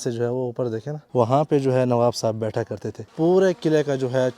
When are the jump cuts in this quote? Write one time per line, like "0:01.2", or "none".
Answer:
0:00.9
0:03.1